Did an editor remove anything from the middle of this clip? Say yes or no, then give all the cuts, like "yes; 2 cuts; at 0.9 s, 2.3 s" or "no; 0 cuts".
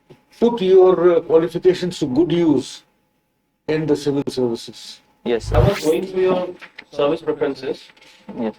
yes; 1 cut; at 5.5 s